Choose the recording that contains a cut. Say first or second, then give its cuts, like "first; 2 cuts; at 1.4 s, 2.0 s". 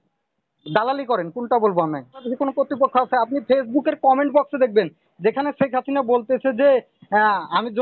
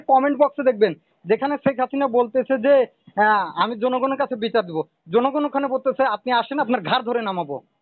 first; 1 cut; at 2.2 s